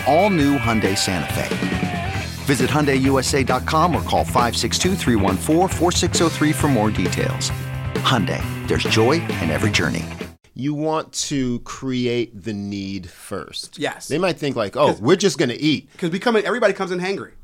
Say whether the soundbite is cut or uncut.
cut